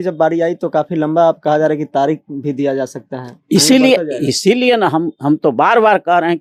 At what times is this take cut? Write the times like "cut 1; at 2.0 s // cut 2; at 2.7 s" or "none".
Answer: none